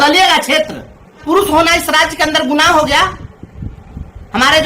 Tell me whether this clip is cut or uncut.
cut